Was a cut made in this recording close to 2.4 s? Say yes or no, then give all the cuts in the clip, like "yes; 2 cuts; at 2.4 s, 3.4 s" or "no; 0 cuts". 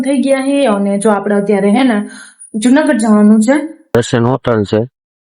no; 1 cut; at 3.9 s